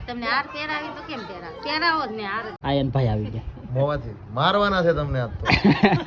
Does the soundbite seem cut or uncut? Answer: cut